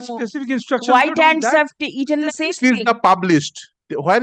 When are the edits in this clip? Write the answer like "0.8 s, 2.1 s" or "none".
2.3 s